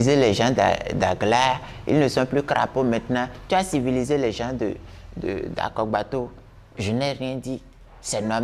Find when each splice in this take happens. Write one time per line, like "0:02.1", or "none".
none